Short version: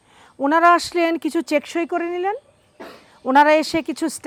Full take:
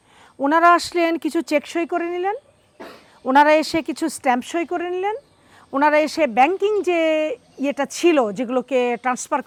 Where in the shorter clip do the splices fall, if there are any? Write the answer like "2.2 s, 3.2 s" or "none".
none

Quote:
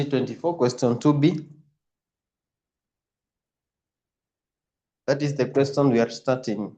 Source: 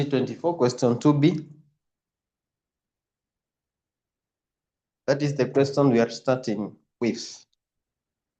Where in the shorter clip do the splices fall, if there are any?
none

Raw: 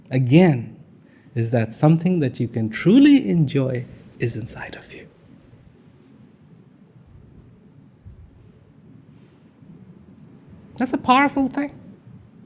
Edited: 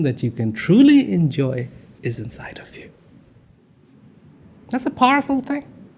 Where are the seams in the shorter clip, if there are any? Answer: 4.3 s

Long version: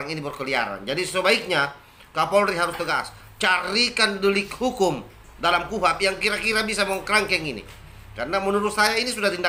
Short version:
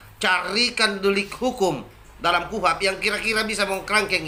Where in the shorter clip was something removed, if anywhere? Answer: none

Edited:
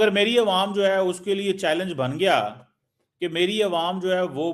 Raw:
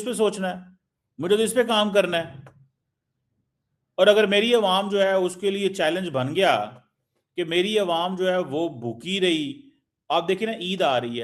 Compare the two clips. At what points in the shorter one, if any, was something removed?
none

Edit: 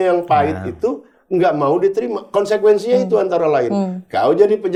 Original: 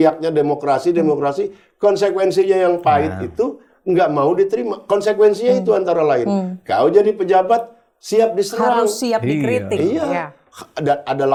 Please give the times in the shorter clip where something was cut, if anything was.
none

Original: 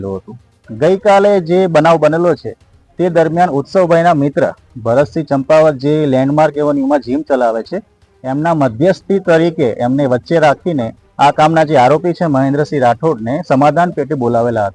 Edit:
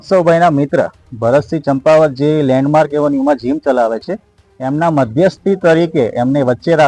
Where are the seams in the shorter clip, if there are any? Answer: none

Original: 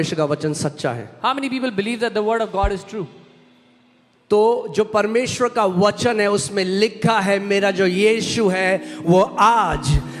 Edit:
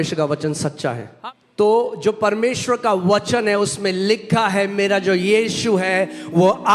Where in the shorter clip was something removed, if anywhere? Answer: 1.1 s

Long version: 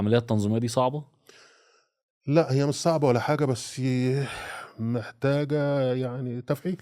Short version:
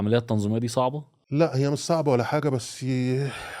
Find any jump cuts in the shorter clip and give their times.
1.1 s

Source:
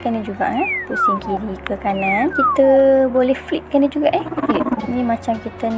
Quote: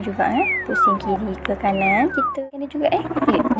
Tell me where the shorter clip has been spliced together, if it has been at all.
2.3 s

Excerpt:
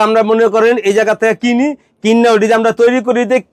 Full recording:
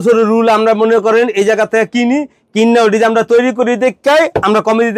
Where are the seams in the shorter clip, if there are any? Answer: none

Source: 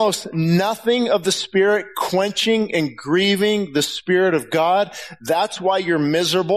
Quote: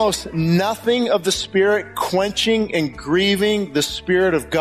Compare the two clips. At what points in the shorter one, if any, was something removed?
none

